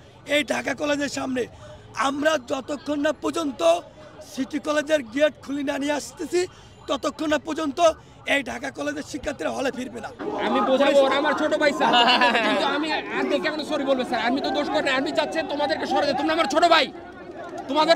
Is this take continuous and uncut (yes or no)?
no